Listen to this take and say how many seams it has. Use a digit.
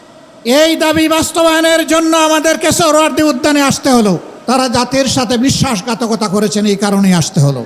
1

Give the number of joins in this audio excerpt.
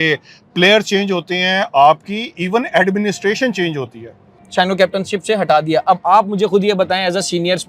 1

